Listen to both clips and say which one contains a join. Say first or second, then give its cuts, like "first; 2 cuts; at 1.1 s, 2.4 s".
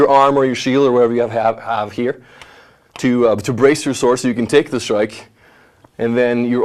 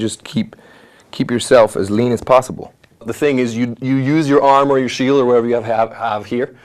second; 1 cut; at 3.1 s